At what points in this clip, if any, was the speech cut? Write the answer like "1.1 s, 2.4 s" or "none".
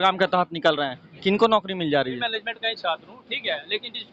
2.2 s